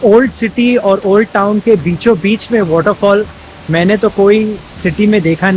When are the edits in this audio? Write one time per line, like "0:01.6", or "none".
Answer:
none